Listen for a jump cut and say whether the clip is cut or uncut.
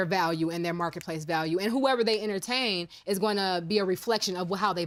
uncut